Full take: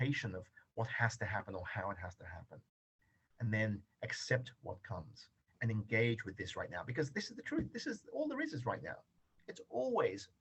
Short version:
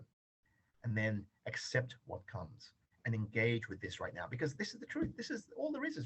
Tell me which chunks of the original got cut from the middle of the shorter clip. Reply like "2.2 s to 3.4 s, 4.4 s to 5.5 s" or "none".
none